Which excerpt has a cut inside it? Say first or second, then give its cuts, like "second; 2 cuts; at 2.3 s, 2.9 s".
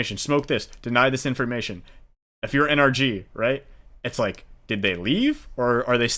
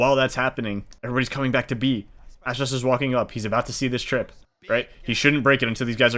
second; 1 cut; at 0.9 s